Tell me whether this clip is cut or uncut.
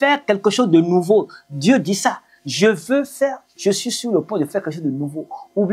uncut